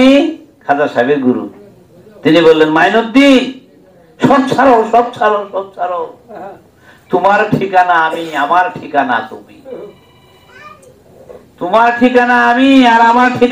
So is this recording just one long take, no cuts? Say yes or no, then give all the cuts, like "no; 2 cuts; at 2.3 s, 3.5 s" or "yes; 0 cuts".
yes; 0 cuts